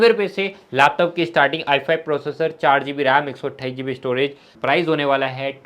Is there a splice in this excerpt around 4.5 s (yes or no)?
yes